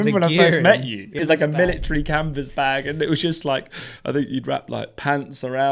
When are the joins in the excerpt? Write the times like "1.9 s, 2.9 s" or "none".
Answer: 1.2 s